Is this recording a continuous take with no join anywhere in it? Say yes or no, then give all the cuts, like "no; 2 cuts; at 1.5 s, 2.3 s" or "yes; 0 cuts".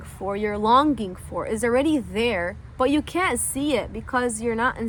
yes; 0 cuts